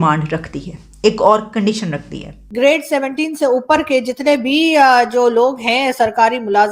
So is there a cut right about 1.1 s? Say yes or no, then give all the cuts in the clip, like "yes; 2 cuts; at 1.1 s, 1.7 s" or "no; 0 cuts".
no; 1 cut; at 2.4 s